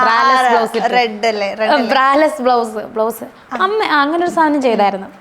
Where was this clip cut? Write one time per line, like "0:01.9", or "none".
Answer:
none